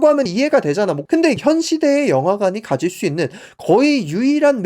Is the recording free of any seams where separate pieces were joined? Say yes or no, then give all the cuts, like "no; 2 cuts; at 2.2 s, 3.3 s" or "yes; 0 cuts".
no; 1 cut; at 1.1 s